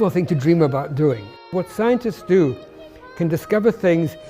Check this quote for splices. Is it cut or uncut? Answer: cut